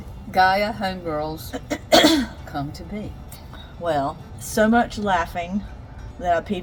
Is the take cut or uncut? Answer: uncut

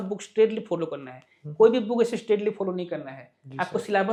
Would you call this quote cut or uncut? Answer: uncut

